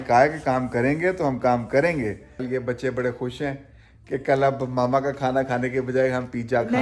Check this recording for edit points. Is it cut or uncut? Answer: cut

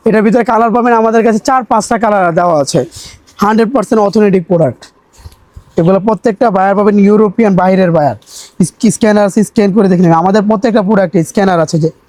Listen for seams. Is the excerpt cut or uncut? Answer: uncut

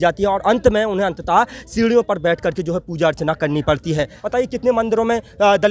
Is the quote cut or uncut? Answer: cut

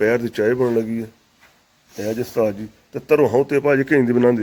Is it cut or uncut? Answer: uncut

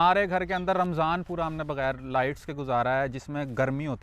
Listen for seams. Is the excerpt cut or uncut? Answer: uncut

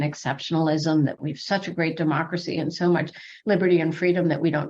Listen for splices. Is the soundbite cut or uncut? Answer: cut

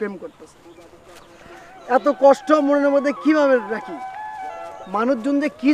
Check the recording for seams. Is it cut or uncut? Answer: uncut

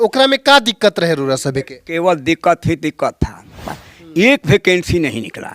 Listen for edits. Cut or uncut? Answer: cut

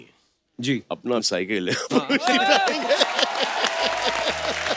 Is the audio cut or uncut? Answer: uncut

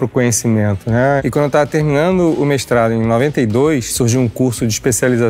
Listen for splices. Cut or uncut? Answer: cut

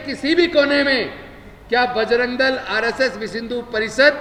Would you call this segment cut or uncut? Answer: uncut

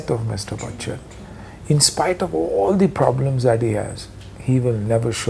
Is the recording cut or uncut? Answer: uncut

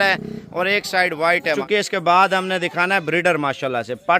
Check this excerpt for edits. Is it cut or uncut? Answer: cut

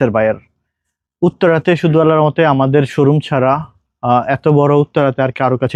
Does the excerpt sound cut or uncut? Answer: uncut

